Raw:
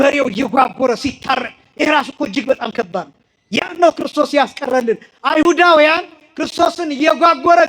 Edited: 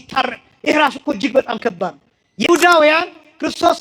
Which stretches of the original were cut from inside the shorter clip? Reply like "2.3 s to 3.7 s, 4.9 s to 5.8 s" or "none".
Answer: 3.6 s to 5.4 s